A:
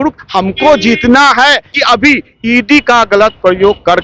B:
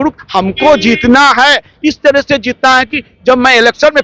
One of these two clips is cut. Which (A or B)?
A